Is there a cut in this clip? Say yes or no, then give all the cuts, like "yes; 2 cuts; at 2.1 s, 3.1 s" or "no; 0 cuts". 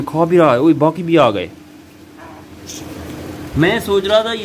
no; 0 cuts